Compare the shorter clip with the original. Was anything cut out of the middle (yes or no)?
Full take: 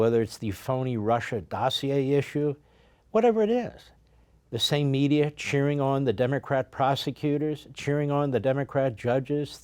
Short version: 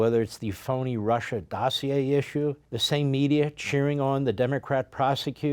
yes